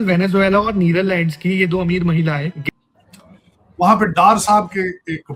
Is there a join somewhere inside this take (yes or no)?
yes